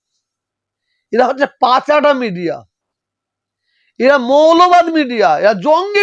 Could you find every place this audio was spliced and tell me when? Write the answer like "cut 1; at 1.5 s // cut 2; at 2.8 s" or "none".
none

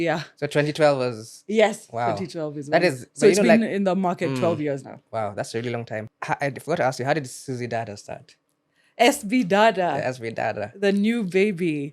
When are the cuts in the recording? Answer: cut 1; at 6.1 s

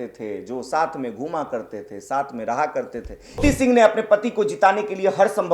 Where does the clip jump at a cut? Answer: cut 1; at 3.4 s

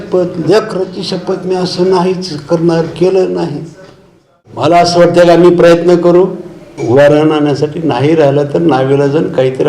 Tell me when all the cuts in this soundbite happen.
cut 1; at 4.4 s

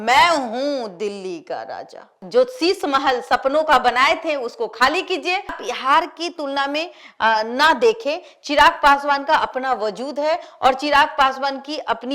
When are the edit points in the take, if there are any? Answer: cut 1; at 2.2 s // cut 2; at 5.6 s

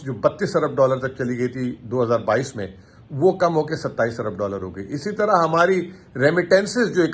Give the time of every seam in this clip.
none

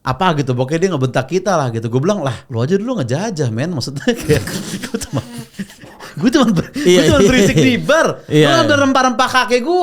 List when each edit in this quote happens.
cut 1; at 2.4 s

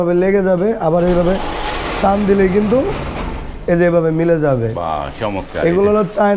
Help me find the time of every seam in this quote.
none

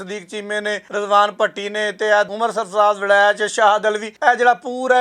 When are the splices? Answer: cut 1; at 0.8 s // cut 2; at 4.1 s

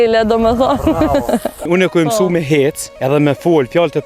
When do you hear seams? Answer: cut 1; at 1.7 s // cut 2; at 2.9 s

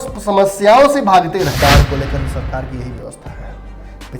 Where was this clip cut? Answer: cut 1; at 1.5 s

